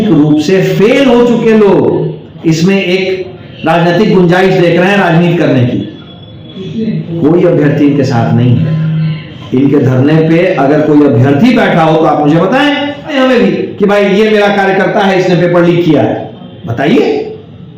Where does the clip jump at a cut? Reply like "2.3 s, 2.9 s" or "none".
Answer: 13.1 s